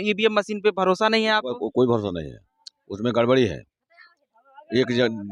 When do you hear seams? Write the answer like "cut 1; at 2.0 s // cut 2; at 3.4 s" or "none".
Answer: none